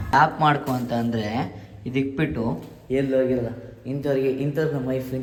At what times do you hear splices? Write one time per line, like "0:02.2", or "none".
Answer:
none